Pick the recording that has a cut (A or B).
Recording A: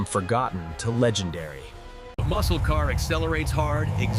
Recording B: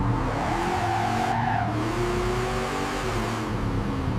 A